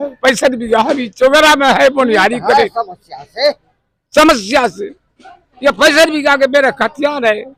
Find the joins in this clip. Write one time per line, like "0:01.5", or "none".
none